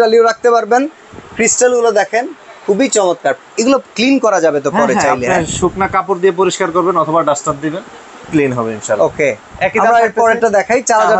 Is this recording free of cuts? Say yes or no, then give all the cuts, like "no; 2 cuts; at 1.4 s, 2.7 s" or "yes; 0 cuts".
yes; 0 cuts